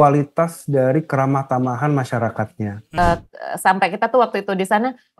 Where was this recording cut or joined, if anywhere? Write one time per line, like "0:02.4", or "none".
0:02.8